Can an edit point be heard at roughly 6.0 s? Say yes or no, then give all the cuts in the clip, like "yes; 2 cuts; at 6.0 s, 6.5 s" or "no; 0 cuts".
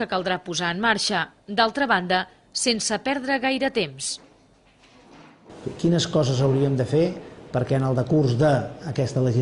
no; 1 cut; at 4.8 s